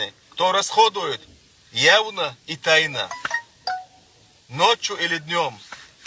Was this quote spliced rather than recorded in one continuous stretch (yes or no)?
no